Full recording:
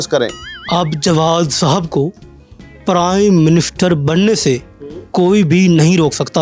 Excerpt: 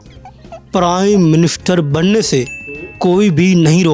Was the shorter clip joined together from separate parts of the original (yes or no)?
no